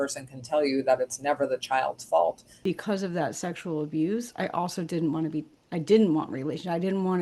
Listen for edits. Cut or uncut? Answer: cut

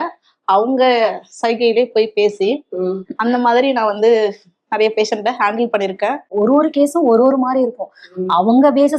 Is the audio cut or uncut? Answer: cut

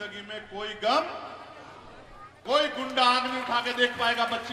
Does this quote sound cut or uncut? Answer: cut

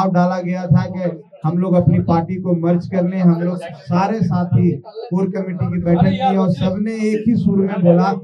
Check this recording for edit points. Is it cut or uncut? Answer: uncut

